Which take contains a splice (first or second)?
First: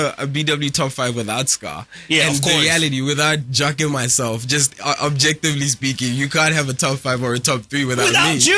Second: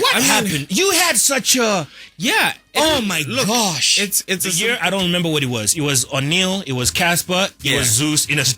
second